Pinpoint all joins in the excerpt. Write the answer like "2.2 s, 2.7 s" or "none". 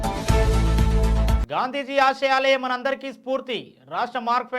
1.4 s